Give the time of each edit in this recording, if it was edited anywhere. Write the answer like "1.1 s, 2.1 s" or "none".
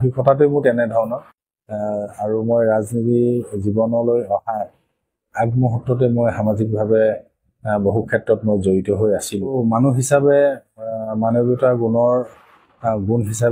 9.5 s